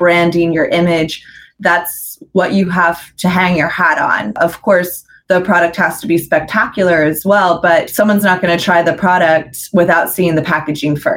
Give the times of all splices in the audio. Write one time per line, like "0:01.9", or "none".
0:04.4
0:07.9